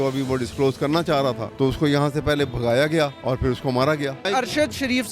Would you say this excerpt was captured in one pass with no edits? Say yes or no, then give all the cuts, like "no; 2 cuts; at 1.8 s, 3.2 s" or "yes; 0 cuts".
no; 3 cuts; at 1.5 s, 3.2 s, 4.2 s